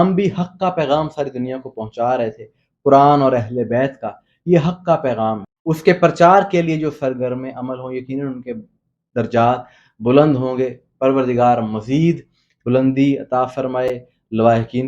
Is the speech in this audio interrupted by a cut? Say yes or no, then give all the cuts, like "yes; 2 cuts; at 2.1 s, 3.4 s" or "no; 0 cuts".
no; 0 cuts